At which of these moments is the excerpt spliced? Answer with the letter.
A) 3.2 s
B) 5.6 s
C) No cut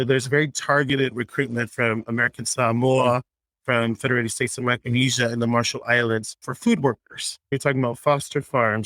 C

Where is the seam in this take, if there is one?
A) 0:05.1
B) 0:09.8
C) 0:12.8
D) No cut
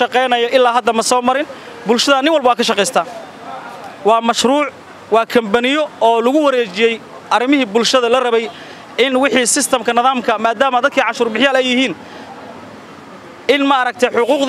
D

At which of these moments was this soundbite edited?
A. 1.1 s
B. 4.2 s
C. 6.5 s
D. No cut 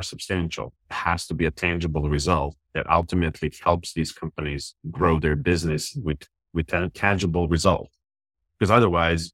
D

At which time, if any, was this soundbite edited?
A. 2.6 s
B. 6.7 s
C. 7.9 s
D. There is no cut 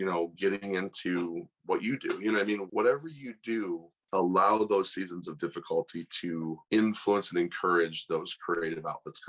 A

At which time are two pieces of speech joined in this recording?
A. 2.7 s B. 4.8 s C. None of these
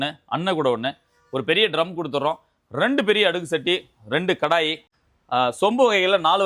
B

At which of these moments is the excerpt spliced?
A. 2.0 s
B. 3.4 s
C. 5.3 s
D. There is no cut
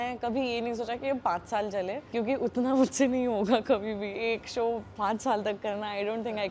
A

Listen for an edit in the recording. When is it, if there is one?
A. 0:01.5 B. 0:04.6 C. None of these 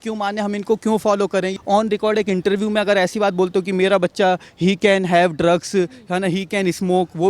A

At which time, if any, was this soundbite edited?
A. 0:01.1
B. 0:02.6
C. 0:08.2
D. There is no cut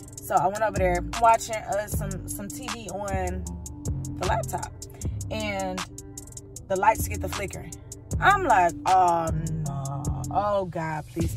A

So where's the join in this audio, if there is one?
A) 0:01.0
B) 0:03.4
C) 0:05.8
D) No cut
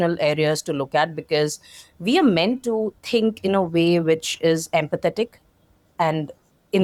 D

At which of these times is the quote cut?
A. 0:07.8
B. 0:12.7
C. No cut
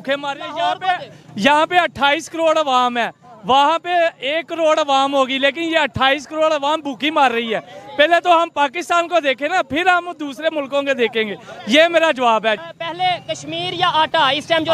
B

